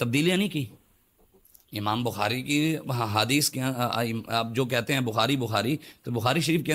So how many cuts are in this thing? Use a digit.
0